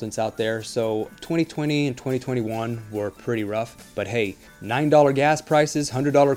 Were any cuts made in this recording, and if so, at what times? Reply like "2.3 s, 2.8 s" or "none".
3.8 s, 4.5 s